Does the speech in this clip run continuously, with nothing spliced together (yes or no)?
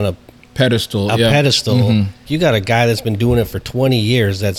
no